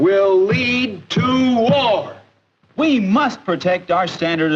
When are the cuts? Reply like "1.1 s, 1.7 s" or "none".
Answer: 2.8 s